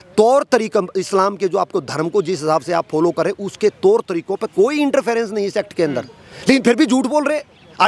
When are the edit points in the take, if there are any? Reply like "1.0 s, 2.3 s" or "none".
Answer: none